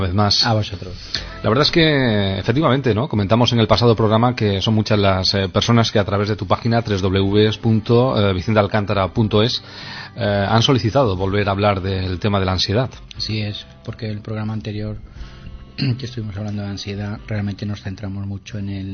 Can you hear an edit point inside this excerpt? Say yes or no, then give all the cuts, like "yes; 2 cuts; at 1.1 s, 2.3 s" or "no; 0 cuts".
yes; 1 cut; at 14.4 s